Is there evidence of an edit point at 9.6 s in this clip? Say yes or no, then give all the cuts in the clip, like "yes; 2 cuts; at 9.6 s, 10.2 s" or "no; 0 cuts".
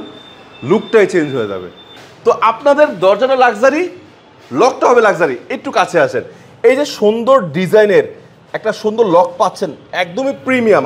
no; 1 cut; at 2.0 s